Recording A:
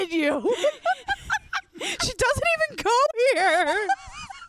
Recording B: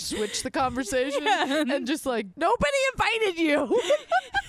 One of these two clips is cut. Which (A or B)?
B